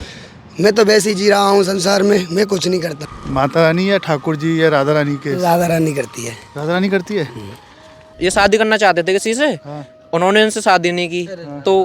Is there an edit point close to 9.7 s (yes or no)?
no